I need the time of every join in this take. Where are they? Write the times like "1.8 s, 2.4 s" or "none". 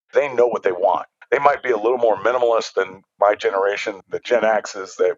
1.1 s, 3.0 s, 4.0 s